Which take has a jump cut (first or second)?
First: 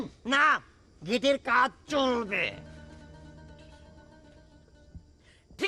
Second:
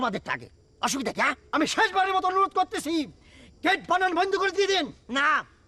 second